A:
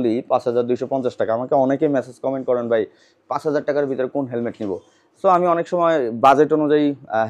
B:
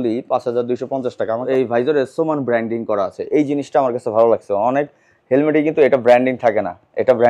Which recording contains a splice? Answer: B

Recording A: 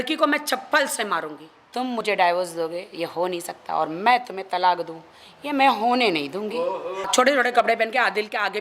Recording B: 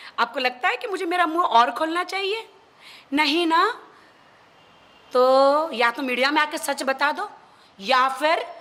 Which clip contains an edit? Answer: A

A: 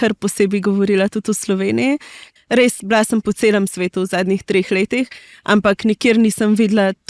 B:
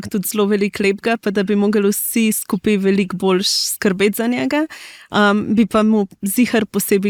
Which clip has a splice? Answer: A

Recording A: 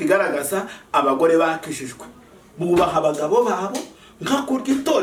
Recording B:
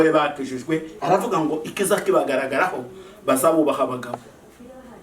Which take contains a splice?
B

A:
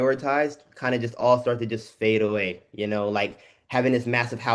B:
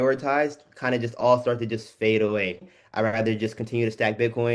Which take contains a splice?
B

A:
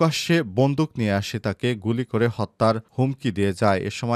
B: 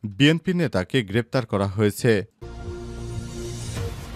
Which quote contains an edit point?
B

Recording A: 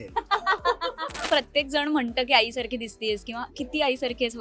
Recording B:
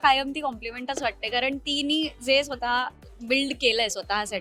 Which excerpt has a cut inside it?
A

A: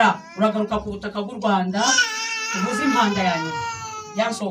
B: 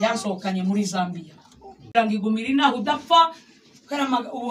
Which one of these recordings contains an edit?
B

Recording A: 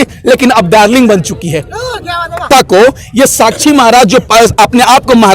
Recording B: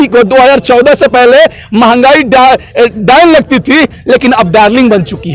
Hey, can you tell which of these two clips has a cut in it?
A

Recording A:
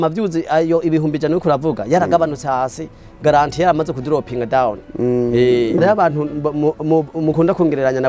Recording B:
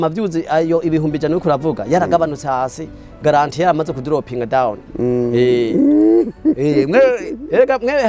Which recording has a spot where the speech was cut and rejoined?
A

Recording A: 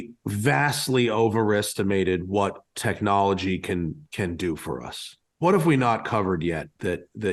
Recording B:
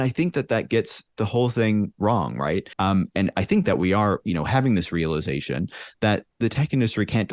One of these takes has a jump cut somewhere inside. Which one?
B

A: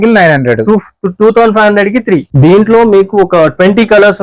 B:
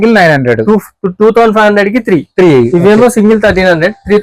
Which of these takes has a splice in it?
A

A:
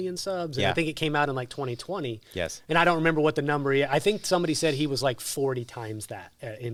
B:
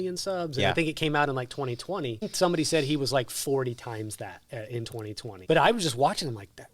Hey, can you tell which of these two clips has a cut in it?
B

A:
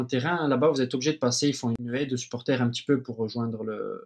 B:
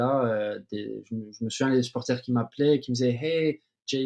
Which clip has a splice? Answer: A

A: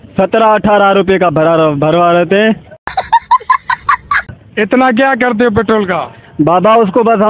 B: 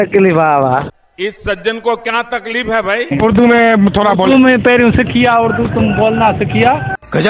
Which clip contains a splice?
B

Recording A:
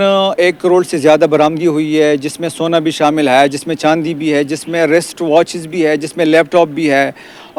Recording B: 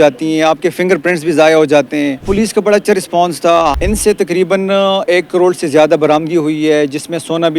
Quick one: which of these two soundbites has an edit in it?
B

